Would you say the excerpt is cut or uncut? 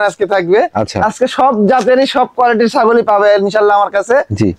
uncut